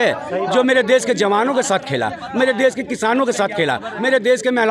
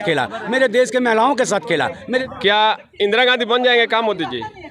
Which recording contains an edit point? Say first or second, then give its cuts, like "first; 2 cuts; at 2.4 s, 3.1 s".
second; 1 cut; at 2.3 s